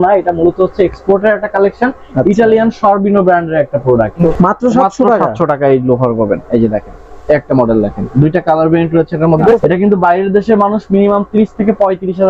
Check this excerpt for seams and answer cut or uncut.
cut